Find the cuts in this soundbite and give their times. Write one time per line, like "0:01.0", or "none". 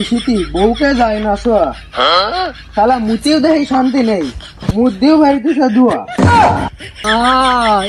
0:06.9